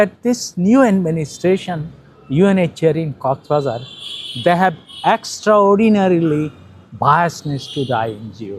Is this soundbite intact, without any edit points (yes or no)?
yes